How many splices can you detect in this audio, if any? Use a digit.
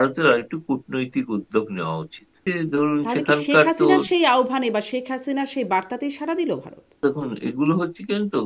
2